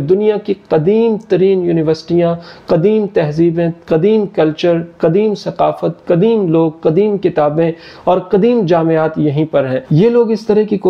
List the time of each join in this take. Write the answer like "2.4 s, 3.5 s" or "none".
none